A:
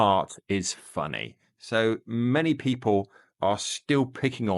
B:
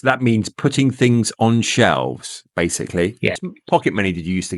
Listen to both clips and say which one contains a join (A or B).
B